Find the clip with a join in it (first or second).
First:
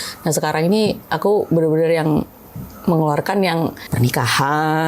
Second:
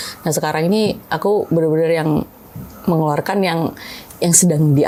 first